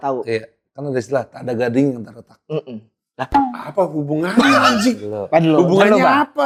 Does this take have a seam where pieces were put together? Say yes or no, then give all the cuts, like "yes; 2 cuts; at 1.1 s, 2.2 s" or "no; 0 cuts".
no; 0 cuts